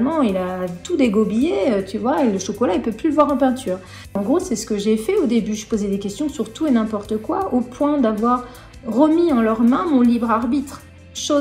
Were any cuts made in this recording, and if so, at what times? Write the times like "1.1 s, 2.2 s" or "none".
4.1 s